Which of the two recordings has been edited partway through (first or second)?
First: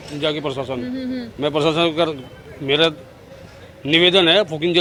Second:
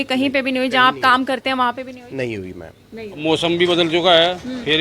second